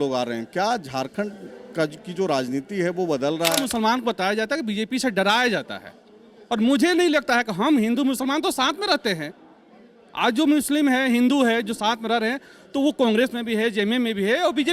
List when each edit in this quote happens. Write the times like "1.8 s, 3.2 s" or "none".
3.6 s